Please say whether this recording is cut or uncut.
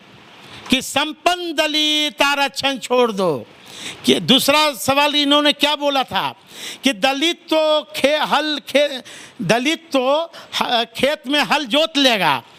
uncut